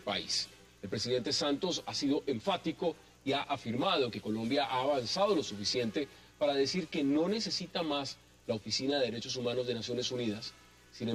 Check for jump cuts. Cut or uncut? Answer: uncut